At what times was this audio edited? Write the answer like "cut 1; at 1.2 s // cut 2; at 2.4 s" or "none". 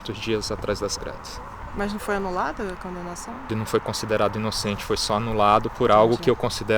cut 1; at 3.5 s